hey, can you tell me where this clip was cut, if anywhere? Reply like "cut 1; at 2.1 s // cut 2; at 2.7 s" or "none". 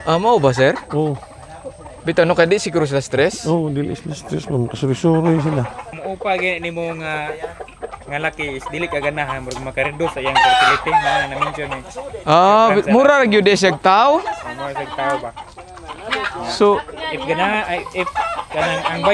cut 1; at 5.8 s